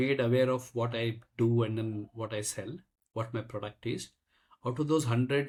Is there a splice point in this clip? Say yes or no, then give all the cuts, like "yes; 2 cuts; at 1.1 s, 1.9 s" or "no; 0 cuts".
no; 0 cuts